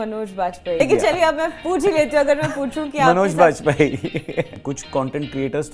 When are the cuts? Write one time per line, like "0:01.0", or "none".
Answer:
0:00.8
0:04.5